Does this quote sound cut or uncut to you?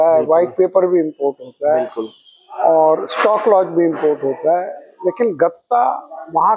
uncut